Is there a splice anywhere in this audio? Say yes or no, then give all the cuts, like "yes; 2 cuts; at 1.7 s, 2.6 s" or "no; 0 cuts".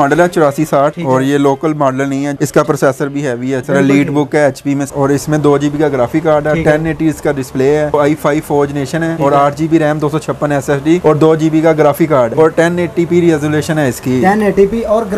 yes; 6 cuts; at 2.3 s, 3.6 s, 4.9 s, 7.9 s, 9.1 s, 12.3 s